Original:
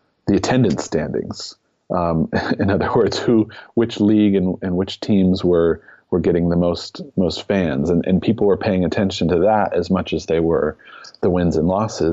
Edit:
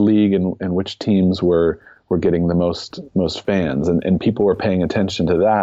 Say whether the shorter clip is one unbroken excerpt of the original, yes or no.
yes